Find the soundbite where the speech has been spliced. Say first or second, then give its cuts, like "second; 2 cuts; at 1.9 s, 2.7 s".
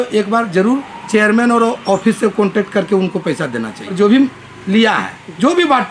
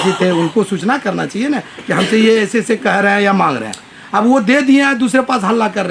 first; 1 cut; at 3.9 s